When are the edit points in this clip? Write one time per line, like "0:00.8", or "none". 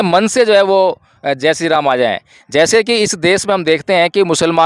none